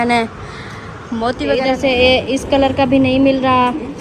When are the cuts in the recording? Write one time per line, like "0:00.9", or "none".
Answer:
0:01.6